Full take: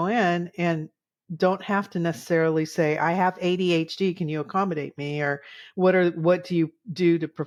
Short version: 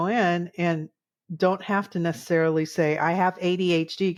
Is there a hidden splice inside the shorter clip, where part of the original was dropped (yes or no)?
no